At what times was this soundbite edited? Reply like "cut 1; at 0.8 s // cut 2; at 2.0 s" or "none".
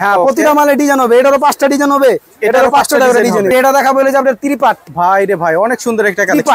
cut 1; at 3.5 s